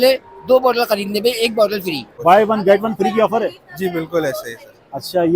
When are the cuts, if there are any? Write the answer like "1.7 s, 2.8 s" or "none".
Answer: 2.1 s